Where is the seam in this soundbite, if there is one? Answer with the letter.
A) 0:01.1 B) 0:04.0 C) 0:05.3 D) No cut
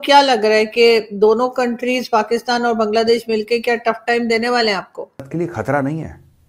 C